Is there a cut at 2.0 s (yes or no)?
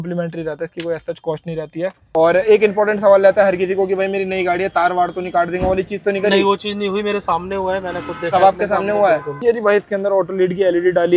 yes